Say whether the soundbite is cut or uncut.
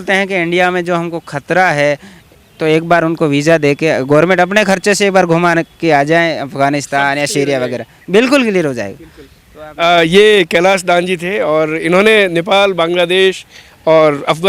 uncut